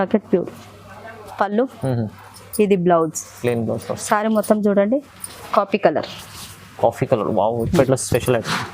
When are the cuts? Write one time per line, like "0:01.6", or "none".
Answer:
0:07.8